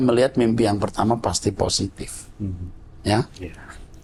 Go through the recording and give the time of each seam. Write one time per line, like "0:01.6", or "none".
none